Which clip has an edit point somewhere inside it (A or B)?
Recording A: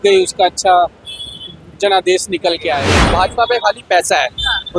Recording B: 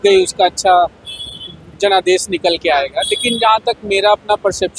A